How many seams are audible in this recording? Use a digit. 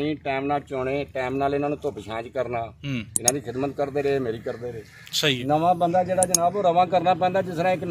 1